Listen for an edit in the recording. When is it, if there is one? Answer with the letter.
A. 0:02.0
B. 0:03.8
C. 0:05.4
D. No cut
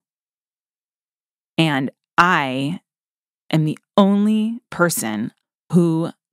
C